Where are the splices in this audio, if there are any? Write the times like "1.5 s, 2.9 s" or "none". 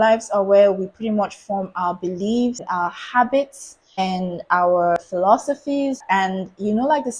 2.6 s, 4.0 s, 5.0 s, 6.0 s